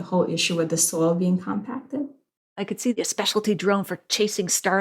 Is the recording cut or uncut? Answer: cut